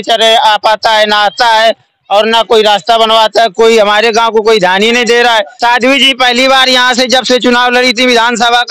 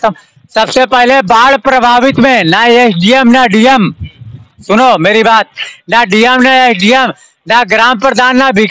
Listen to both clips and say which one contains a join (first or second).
first